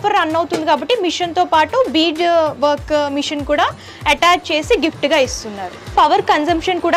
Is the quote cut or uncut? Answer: cut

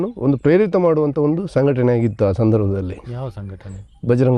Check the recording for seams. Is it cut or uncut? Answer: uncut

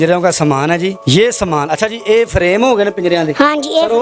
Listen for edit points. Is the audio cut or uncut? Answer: cut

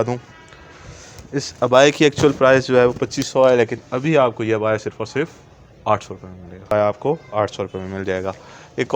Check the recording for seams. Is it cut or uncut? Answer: cut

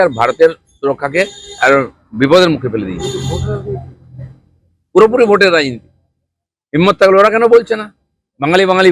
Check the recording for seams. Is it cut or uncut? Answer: uncut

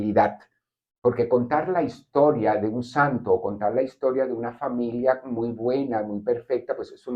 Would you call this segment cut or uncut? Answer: uncut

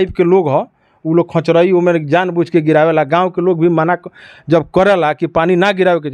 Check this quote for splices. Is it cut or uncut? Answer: uncut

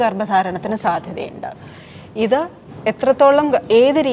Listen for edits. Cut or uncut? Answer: uncut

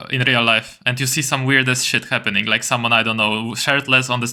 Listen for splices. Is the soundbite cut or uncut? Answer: uncut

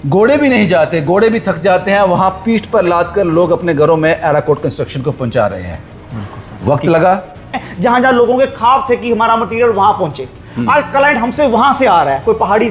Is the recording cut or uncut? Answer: cut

